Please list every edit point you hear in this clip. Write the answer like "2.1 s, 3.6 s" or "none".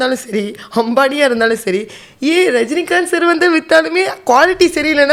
none